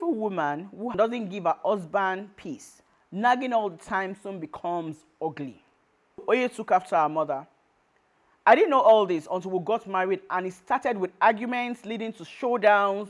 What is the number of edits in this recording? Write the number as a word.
two